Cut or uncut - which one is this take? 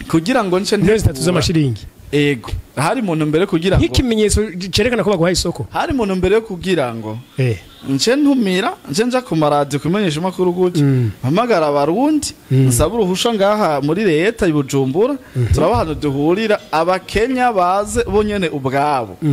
uncut